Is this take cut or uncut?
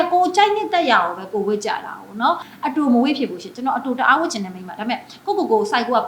cut